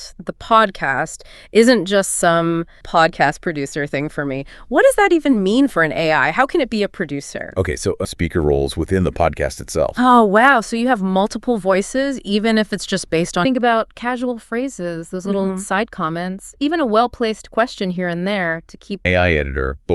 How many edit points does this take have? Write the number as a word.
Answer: four